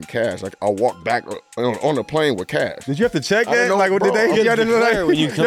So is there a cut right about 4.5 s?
no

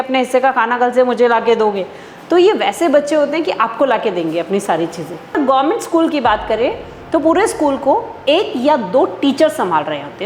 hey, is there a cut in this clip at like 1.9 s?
no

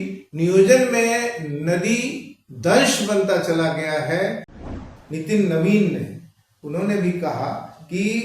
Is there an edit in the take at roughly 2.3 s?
no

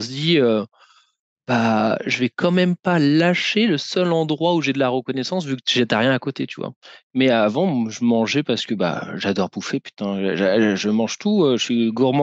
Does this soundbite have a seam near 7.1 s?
yes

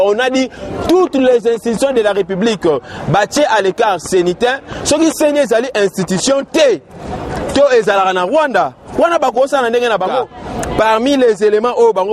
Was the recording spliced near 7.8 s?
no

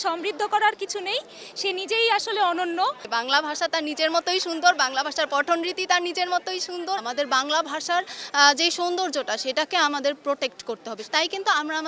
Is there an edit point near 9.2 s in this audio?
no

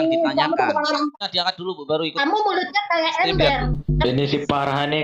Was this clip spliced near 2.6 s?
no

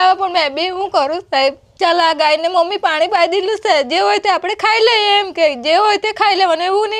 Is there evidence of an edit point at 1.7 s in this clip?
yes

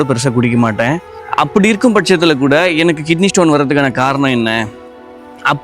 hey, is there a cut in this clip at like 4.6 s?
no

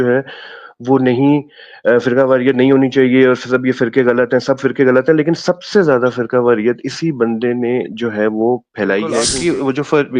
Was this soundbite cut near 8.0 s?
no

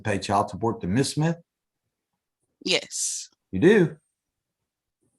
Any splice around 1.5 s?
no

